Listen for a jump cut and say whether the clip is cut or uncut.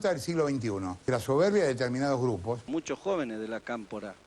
cut